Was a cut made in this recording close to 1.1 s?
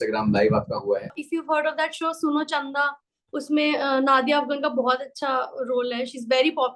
yes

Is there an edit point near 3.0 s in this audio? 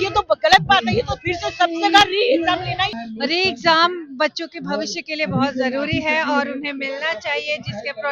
yes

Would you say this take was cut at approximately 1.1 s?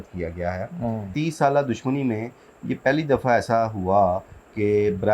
yes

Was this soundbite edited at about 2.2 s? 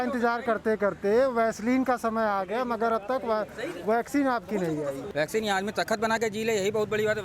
no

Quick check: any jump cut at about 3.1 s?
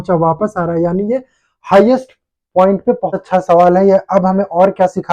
yes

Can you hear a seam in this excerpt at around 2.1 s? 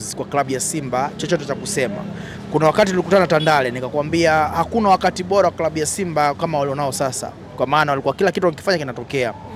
no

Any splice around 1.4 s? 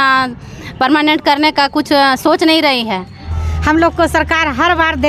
no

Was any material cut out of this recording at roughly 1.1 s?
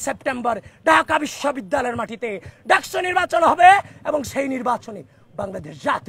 no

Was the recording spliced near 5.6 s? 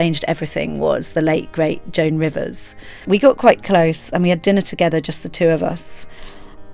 no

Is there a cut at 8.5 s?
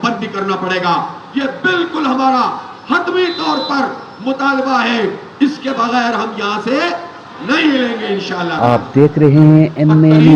yes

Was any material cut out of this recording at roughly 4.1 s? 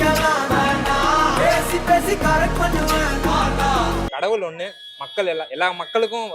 yes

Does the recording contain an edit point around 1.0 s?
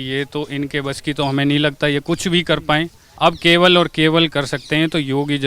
no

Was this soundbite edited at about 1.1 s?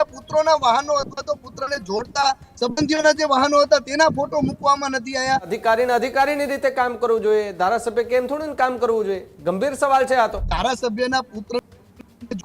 no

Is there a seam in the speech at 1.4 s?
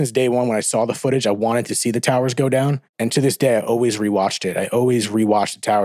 yes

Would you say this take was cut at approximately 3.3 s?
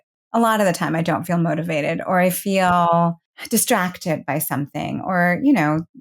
yes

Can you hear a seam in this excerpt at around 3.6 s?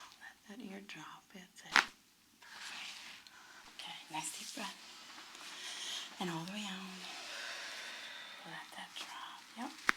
yes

